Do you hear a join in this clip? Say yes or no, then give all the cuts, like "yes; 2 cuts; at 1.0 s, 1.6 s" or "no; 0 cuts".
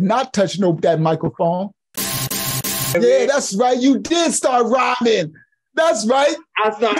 yes; 1 cut; at 2.4 s